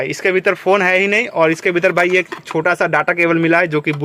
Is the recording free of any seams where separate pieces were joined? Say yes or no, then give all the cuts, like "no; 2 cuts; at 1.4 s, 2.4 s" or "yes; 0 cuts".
yes; 0 cuts